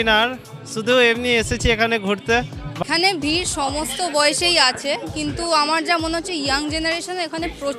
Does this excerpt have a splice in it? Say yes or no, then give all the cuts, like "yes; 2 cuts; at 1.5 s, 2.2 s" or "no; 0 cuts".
yes; 1 cut; at 2.8 s